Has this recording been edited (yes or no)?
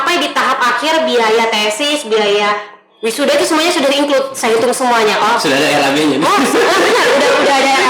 no